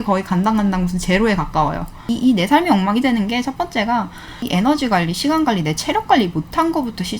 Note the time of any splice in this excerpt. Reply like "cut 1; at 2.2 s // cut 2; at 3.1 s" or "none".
cut 1; at 2.1 s // cut 2; at 4.4 s